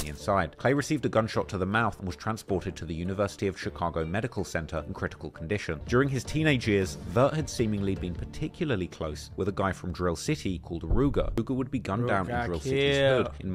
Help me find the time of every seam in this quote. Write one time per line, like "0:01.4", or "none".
0:05.8
0:11.4

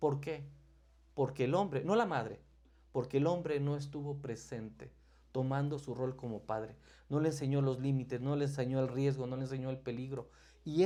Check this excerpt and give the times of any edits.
none

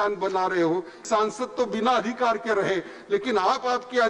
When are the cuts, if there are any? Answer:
0:01.0

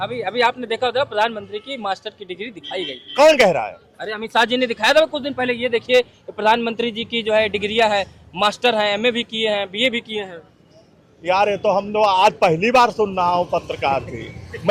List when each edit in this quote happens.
none

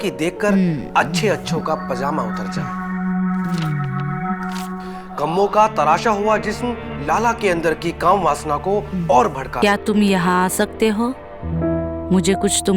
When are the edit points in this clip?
0:09.5

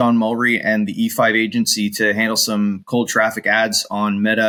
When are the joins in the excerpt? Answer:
none

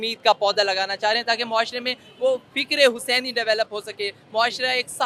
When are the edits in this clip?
none

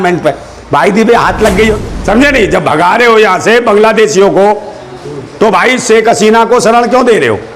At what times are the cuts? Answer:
0:01.7

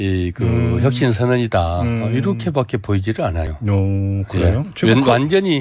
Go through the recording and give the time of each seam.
0:02.1

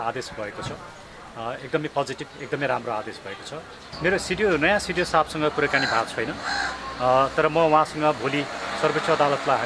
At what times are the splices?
0:03.9

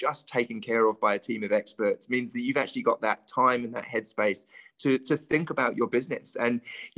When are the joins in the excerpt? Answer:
none

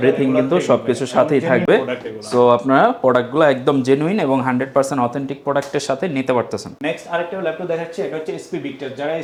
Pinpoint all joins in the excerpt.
none

